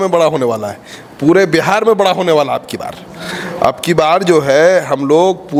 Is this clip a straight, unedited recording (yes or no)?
yes